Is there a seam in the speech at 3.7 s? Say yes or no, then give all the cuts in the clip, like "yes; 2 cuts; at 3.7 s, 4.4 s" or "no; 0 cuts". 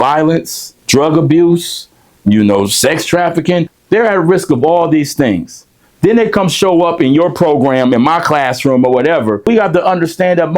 yes; 2 cuts; at 3.7 s, 9.5 s